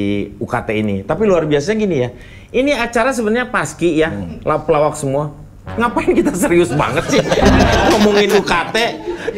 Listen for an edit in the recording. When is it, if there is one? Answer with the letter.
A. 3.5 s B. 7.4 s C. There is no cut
C